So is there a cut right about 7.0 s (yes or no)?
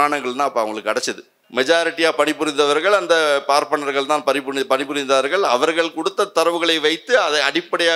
no